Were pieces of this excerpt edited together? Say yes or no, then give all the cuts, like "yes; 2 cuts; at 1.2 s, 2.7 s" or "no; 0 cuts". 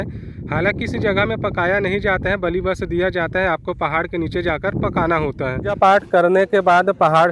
yes; 1 cut; at 5.7 s